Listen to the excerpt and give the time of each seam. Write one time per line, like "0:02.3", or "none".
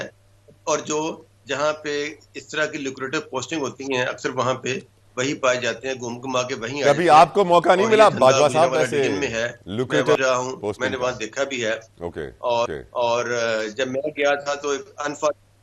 none